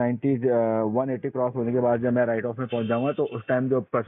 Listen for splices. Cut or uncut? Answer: uncut